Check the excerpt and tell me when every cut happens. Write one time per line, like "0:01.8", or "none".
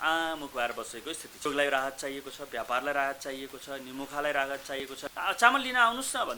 0:01.4
0:04.8